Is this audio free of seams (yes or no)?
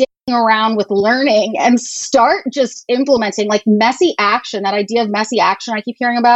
yes